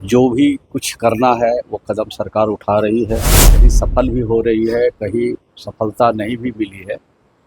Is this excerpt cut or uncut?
cut